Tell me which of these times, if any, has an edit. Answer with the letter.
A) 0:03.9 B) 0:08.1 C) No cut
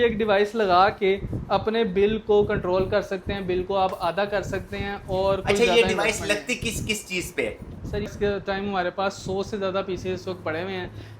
B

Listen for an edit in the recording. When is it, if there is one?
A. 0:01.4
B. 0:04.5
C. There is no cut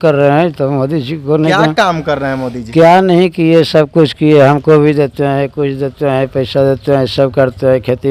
C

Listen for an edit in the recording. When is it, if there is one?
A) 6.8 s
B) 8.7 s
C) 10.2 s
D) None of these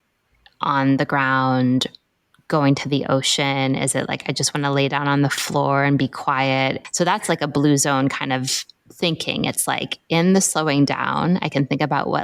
A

